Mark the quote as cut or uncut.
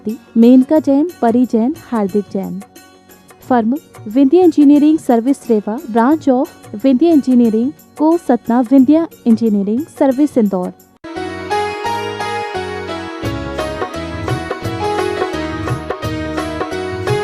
cut